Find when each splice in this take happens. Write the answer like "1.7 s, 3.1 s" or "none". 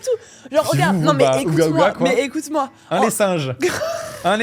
none

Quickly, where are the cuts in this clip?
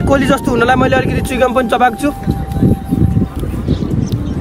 none

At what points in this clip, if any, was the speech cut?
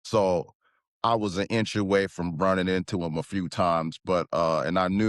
none

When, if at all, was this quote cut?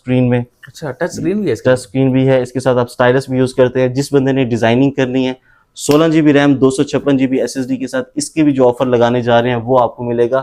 none

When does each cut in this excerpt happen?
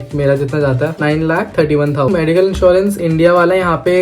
0.9 s, 2.1 s

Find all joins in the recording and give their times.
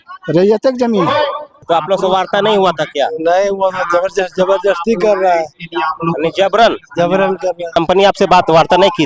1.5 s, 7.8 s

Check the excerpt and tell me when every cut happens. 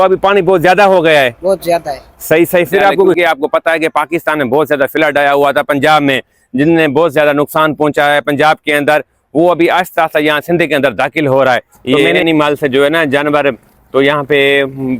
3.2 s, 11.8 s

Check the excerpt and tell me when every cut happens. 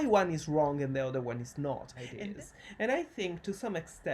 2.3 s

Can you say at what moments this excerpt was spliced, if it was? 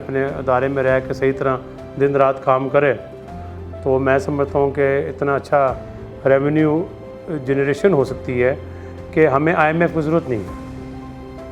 none

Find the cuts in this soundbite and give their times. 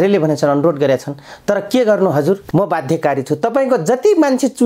2.4 s

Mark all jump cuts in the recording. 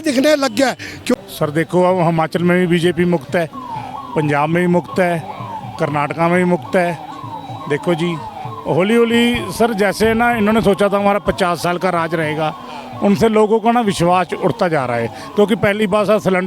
1.1 s

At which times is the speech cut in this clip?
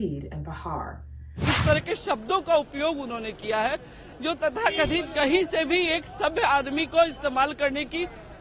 1.5 s

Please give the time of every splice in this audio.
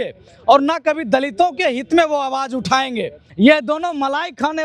3.2 s

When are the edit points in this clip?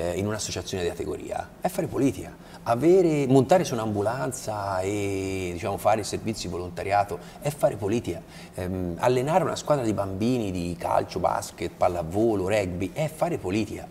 none

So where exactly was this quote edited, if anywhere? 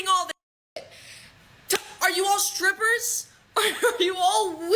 1.9 s

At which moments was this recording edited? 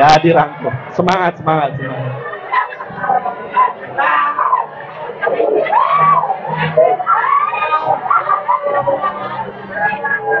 none

